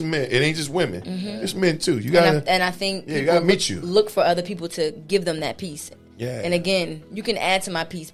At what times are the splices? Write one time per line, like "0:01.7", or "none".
none